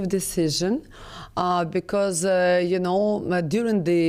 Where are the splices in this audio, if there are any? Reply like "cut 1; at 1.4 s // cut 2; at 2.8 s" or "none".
none

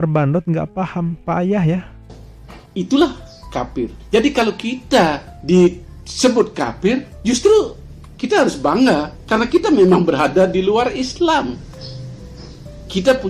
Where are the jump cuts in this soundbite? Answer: none

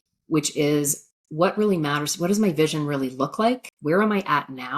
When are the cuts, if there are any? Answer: cut 1; at 3.7 s

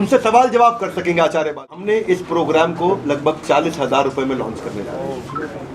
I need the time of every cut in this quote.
cut 1; at 1.8 s

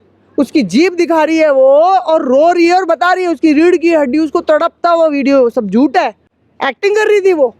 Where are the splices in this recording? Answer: none

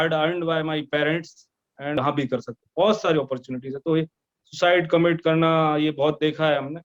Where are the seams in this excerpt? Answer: cut 1; at 2.0 s

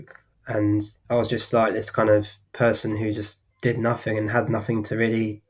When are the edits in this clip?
cut 1; at 0.9 s // cut 2; at 2.4 s // cut 3; at 3.4 s

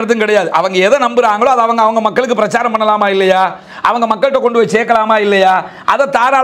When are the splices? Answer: none

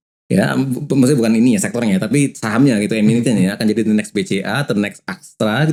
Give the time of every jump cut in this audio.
none

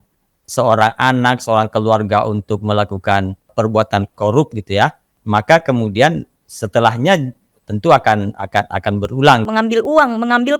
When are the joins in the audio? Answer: cut 1; at 3.5 s // cut 2; at 5.1 s // cut 3; at 9.5 s

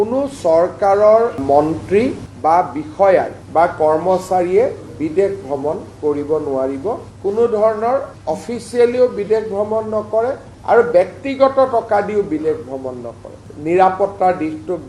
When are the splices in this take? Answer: cut 1; at 7.0 s // cut 2; at 13.4 s

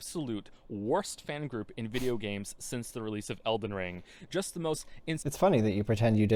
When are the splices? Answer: none

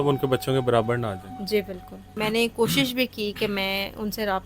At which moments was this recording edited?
cut 1; at 2.1 s

